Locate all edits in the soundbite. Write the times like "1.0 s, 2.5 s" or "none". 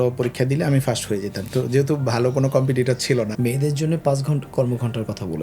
3.3 s